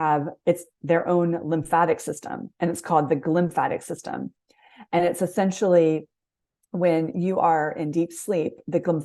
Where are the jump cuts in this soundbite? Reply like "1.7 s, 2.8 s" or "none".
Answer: none